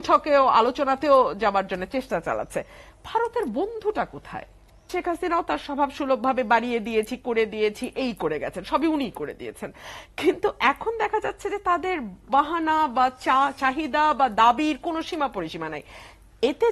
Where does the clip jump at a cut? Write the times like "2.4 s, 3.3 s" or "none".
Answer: 4.9 s